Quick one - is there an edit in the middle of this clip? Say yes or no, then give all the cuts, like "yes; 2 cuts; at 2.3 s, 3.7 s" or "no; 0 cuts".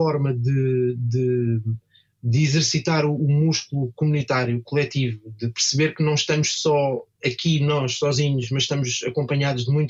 no; 0 cuts